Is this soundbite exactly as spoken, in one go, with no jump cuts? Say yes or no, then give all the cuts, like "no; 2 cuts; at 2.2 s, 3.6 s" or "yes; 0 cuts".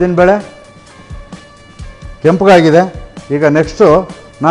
yes; 0 cuts